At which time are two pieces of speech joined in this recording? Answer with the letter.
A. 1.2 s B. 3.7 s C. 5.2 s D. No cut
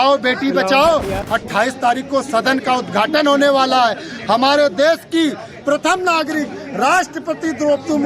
A